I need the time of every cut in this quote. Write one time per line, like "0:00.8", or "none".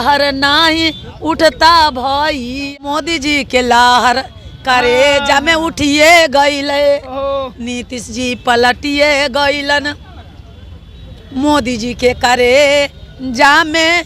0:02.6